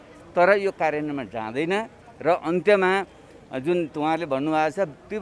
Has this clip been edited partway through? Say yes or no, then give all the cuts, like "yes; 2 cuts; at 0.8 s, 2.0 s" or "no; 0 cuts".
no; 0 cuts